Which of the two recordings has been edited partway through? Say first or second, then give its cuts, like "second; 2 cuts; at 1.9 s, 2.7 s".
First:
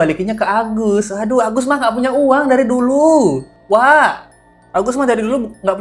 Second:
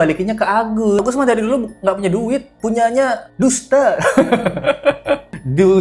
second; 1 cut; at 1.0 s